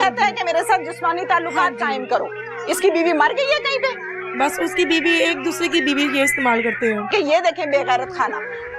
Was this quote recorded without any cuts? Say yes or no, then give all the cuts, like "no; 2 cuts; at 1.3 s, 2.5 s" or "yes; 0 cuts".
no; 1 cut; at 7.1 s